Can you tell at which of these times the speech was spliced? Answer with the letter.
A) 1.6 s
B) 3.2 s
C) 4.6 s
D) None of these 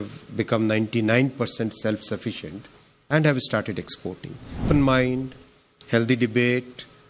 C